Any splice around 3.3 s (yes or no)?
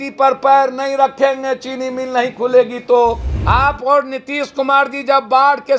yes